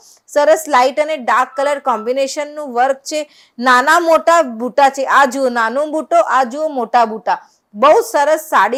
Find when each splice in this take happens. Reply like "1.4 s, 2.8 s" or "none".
none

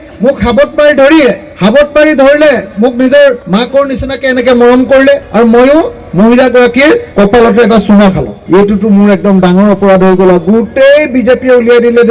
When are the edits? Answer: 1.5 s, 3.4 s, 5.3 s, 7.1 s, 8.3 s

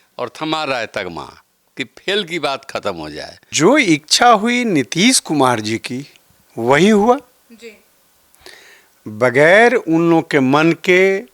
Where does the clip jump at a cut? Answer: 3.4 s

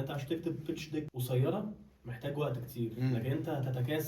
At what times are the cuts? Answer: 1.2 s

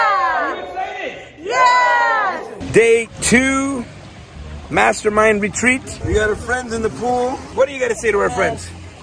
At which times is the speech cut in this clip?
2.5 s, 5.9 s, 7.5 s

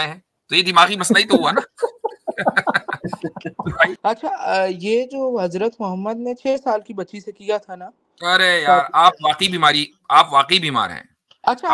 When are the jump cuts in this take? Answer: 3.9 s

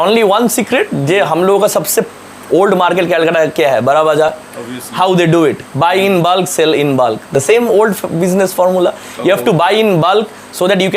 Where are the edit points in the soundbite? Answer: none

